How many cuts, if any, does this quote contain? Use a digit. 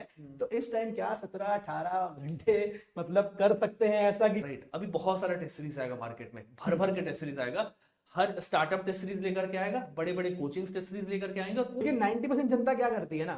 2